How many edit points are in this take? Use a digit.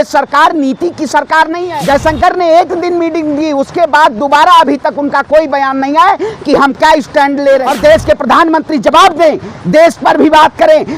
2